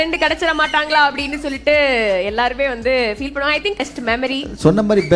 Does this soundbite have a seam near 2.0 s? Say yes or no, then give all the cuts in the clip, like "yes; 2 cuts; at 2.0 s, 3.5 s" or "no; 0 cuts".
no; 1 cut; at 3.9 s